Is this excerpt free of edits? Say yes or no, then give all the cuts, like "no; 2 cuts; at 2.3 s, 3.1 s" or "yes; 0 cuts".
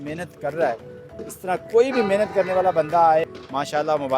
no; 1 cut; at 3.2 s